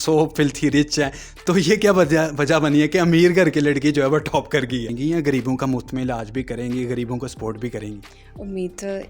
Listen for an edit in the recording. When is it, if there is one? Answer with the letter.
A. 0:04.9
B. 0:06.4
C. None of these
A